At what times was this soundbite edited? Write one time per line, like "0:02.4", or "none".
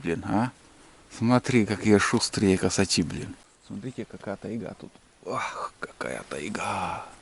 0:03.4